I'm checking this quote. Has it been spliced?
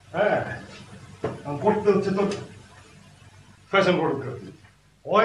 no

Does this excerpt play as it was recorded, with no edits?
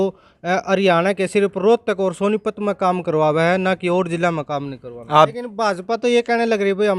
no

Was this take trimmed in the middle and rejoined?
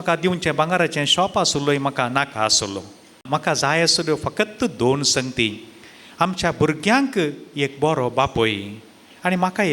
yes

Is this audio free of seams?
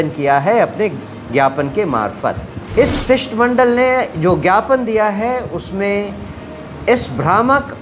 no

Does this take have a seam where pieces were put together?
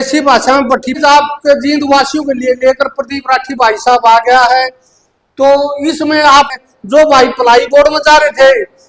yes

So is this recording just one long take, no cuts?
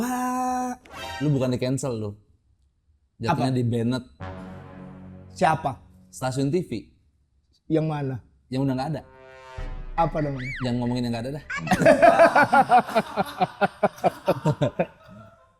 yes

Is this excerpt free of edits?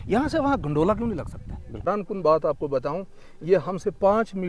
no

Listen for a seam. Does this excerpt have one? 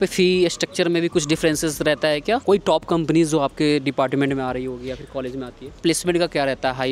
yes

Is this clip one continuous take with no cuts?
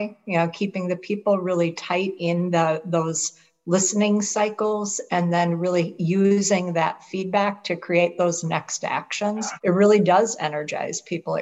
no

